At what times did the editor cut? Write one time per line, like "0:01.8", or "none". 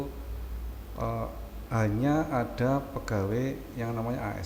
none